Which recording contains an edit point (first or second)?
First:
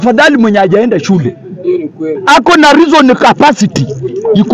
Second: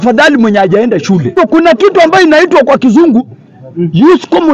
second